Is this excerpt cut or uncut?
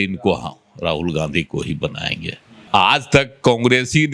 cut